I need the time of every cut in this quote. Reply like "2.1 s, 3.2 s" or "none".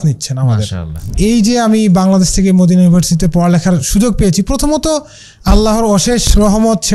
1.1 s

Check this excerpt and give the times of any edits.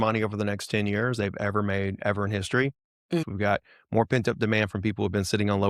3.2 s

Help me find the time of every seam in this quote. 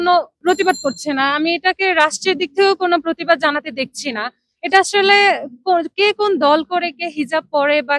none

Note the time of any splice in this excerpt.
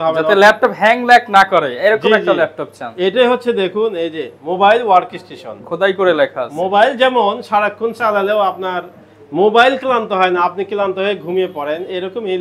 none

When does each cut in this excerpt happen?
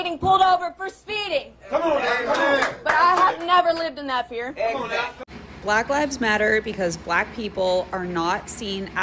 5.2 s

